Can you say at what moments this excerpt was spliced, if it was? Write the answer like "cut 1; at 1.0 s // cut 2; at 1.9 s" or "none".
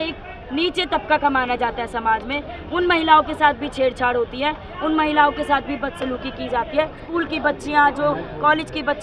cut 1; at 7.0 s